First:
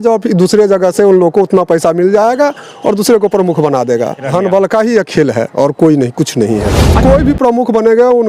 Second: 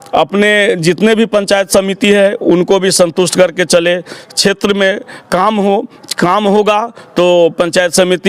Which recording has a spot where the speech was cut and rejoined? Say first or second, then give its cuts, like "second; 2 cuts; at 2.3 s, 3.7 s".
first; 2 cuts; at 4.2 s, 7.0 s